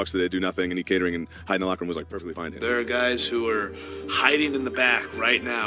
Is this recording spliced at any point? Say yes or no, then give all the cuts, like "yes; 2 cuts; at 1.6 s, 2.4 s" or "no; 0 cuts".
yes; 1 cut; at 2.5 s